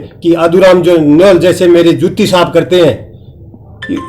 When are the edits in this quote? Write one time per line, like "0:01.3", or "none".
none